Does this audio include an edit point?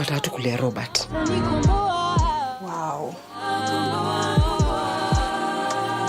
no; 0 cuts

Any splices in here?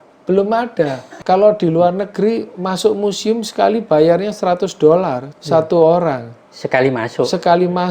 yes; 2 cuts; at 1.1 s, 5.3 s

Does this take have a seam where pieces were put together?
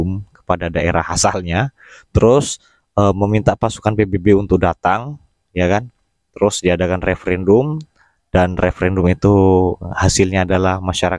no; 0 cuts

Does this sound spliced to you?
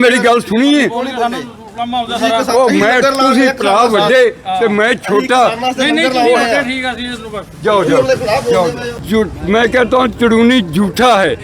yes; 1 cut; at 8.9 s

